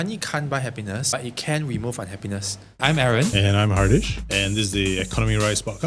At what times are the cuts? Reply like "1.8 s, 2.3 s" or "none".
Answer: 1.1 s, 2.7 s